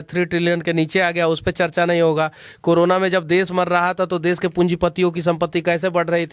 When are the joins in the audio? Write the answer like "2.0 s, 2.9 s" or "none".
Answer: none